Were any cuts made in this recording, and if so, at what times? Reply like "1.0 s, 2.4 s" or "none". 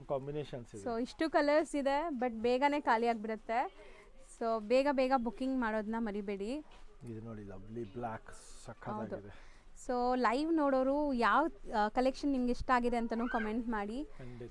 none